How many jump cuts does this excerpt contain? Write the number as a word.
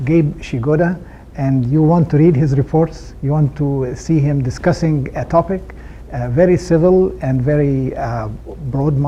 zero